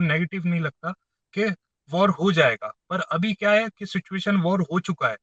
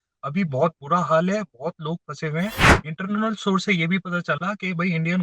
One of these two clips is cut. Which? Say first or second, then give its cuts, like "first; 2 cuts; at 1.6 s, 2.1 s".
second; 1 cut; at 2.7 s